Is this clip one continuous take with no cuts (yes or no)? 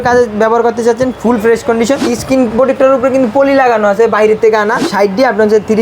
no